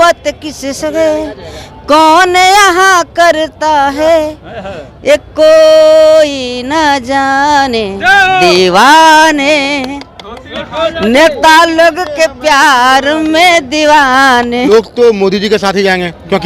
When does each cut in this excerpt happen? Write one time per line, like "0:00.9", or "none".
0:14.7